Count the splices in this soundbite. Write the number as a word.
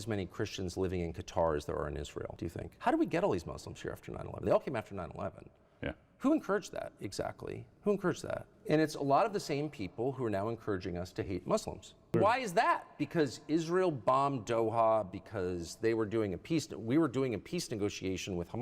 two